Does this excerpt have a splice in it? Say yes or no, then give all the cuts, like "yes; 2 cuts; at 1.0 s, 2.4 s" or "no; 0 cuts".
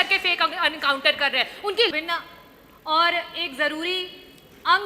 yes; 1 cut; at 1.9 s